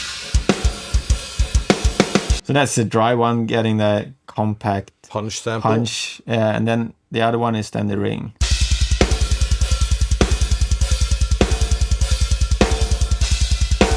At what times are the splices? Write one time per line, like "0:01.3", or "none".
0:02.3